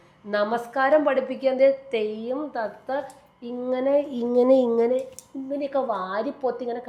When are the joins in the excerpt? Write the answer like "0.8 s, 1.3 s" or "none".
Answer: none